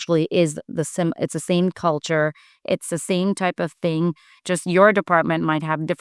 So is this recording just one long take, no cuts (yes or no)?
yes